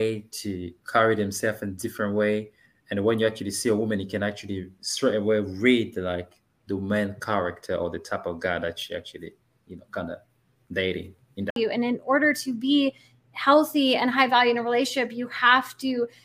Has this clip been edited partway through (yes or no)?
yes